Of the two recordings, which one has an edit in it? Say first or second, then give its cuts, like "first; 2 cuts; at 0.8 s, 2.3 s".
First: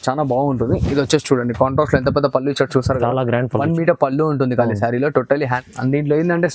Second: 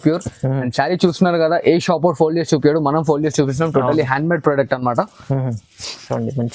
first; 1 cut; at 5.6 s